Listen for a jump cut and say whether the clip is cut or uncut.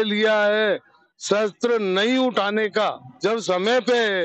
cut